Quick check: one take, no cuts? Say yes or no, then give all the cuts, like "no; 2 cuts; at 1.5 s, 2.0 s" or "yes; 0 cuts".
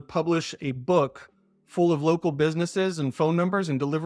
yes; 0 cuts